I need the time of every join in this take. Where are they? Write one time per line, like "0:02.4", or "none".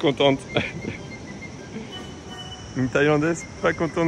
0:02.5

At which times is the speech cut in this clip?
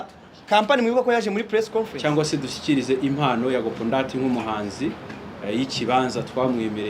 0:01.9

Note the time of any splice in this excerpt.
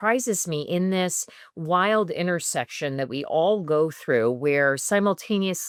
none

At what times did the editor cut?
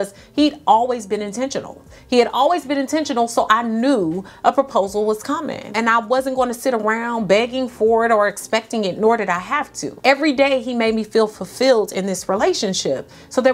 none

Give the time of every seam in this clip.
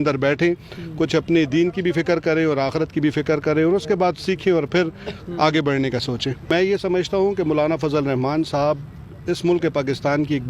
0:06.5

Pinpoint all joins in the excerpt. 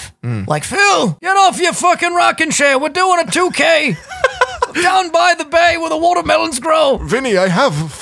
0:01.2

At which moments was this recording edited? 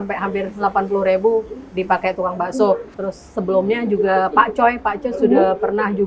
0:02.9

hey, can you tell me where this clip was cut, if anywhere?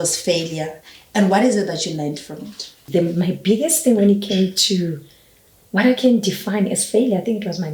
0:02.8

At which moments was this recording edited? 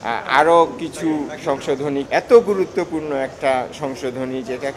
0:02.1

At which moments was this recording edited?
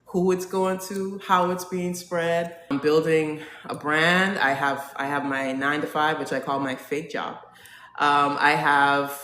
0:02.7

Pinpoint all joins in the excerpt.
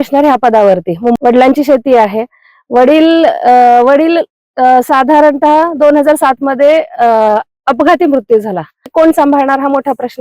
0:01.2
0:08.9

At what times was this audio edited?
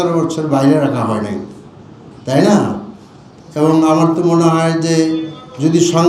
none

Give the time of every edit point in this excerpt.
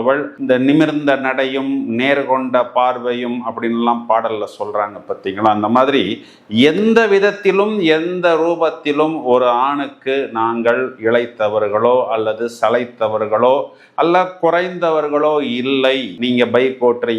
none

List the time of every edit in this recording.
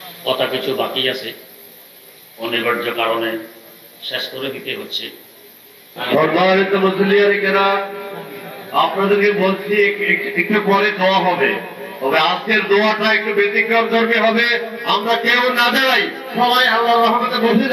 0:05.9

